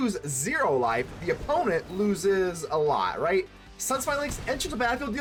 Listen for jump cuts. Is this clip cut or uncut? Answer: uncut